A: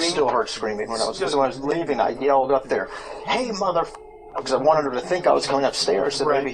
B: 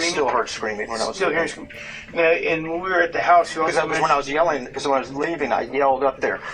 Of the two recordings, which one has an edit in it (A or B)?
A